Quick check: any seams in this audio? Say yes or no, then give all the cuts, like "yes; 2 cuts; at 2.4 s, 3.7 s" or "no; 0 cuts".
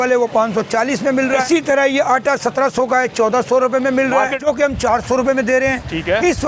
yes; 2 cuts; at 1.4 s, 4.4 s